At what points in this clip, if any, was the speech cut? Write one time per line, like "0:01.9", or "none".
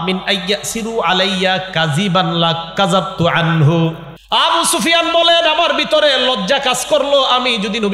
0:04.1

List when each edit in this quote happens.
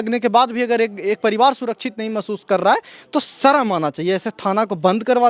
none

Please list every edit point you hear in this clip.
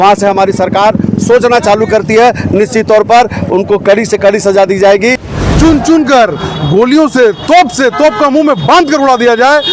0:05.3

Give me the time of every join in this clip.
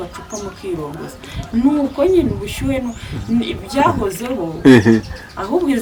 none

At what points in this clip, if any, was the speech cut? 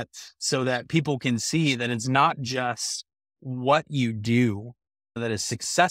none

